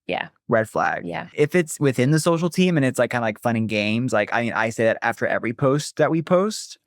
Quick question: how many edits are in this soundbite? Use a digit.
1